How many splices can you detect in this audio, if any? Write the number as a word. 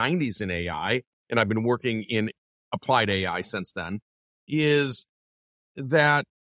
one